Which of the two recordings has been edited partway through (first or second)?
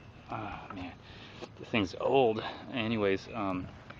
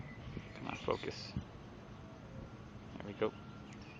first